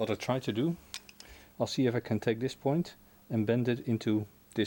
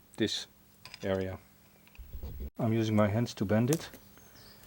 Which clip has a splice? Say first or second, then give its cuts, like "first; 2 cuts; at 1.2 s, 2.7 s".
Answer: second; 1 cut; at 2.5 s